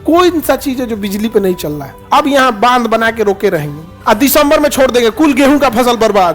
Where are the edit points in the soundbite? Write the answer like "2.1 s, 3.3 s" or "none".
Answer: 2.0 s, 4.0 s

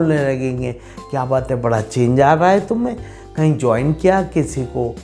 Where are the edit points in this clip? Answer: none

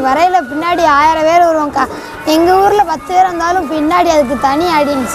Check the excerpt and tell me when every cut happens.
none

